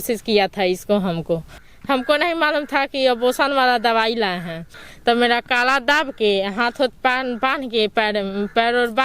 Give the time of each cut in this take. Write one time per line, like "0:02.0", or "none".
0:01.5
0:04.8